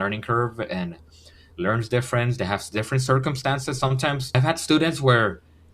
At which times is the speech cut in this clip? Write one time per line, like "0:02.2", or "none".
0:04.4